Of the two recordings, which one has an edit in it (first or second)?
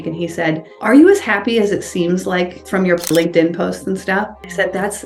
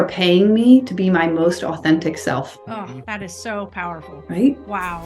second